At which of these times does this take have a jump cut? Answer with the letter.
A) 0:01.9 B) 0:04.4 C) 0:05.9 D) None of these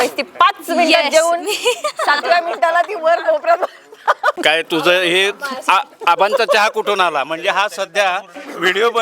B